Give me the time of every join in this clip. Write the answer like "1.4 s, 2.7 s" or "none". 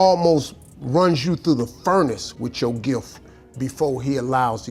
none